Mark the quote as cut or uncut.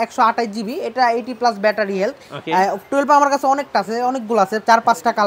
uncut